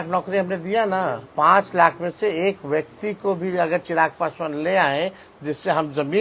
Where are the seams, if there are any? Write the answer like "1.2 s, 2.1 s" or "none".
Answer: 1.2 s